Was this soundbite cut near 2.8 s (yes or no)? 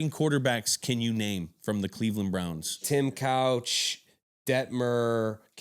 yes